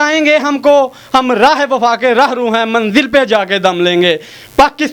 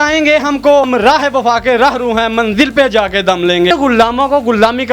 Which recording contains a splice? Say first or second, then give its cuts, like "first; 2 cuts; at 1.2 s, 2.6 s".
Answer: second; 2 cuts; at 0.9 s, 3.7 s